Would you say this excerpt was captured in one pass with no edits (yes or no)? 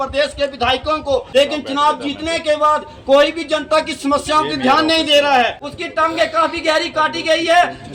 no